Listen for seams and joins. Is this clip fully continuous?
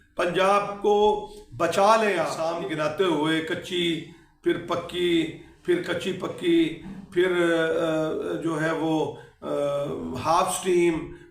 no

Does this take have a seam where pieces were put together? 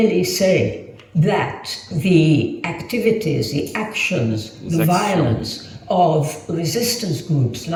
no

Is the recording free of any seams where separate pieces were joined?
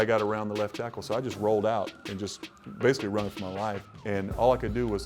no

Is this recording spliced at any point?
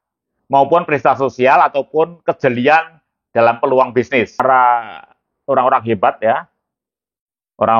yes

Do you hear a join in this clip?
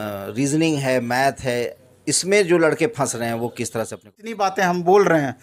yes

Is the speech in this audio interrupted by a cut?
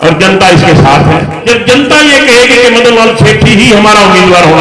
yes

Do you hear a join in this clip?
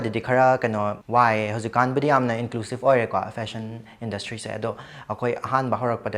yes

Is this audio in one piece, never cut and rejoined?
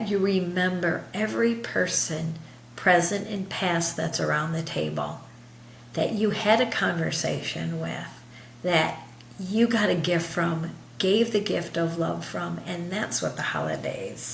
yes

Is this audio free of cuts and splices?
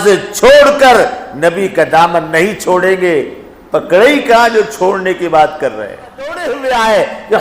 no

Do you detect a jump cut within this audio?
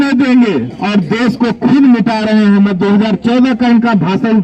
no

